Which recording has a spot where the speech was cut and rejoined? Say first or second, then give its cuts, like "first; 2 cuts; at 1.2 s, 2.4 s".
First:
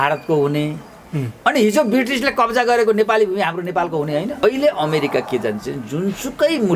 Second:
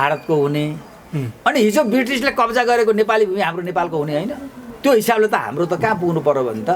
first; 1 cut; at 4.4 s